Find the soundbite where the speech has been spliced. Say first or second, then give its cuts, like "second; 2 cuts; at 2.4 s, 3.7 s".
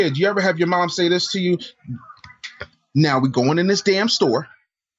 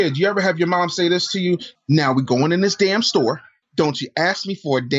second; 2 cuts; at 1.7 s, 3.5 s